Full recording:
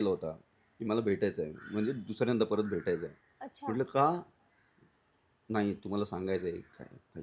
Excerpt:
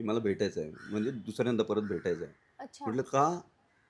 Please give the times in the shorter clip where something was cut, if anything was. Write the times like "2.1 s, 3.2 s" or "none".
none